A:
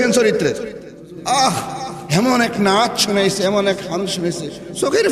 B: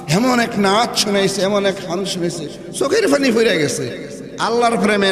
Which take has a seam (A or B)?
A